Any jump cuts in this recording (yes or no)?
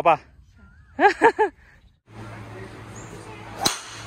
yes